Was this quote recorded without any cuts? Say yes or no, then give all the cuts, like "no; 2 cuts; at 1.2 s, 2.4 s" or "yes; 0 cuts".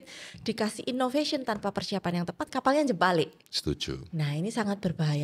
no; 1 cut; at 3.5 s